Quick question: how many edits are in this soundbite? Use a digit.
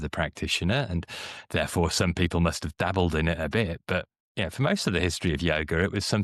0